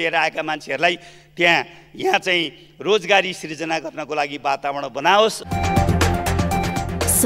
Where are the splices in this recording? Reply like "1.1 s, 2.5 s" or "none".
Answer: 5.4 s